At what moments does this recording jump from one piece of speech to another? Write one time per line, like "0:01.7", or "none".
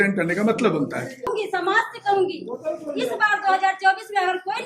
0:01.3